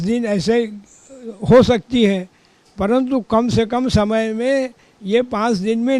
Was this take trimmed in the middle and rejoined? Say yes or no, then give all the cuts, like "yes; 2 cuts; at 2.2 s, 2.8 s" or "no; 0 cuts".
no; 0 cuts